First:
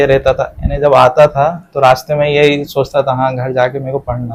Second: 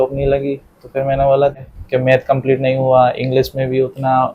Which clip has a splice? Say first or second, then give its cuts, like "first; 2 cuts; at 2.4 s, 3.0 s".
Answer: second; 1 cut; at 1.8 s